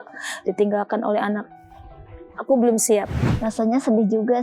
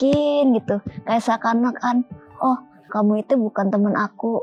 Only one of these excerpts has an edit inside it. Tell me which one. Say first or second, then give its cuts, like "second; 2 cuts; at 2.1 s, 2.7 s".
first; 1 cut; at 3.2 s